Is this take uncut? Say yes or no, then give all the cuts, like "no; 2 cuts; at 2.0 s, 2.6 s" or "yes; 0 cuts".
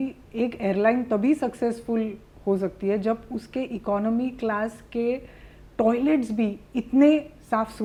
yes; 0 cuts